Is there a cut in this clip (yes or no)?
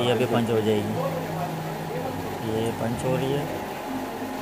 no